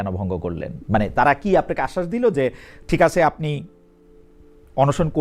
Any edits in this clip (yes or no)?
no